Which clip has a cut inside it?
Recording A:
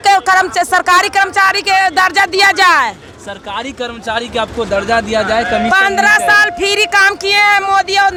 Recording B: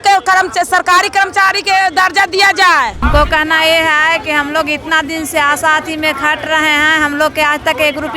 B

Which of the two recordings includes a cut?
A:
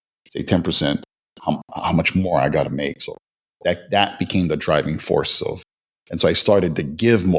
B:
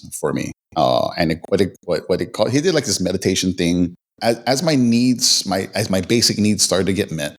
B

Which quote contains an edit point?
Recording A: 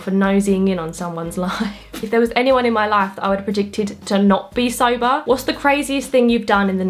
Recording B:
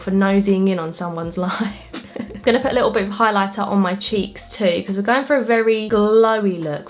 A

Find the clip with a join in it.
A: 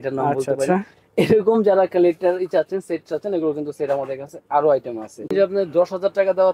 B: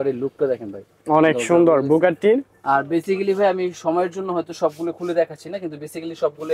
A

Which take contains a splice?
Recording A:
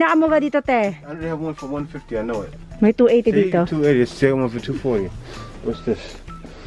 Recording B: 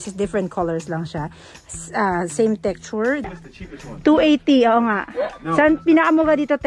B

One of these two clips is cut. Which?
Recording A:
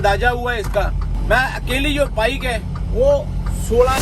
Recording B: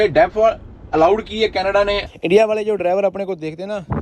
B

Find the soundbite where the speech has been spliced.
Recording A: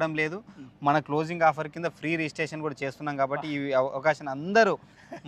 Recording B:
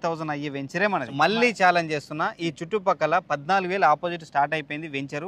B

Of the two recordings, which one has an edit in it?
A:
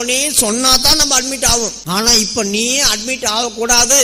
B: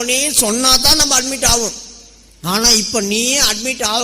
A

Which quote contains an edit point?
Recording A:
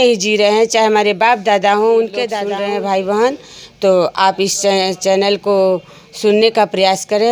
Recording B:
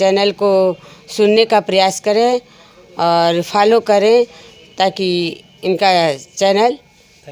A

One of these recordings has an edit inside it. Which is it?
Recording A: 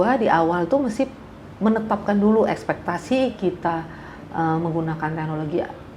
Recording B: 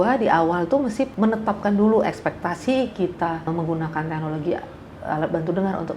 B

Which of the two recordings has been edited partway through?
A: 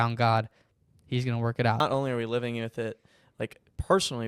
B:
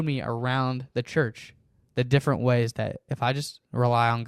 A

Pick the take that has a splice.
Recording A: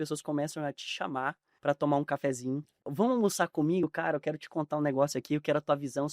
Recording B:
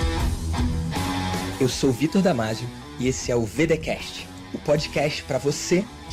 A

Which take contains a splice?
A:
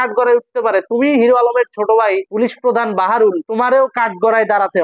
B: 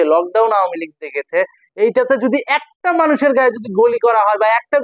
A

